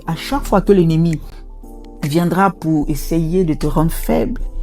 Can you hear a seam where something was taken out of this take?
no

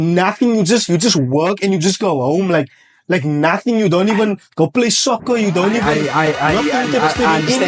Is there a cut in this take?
no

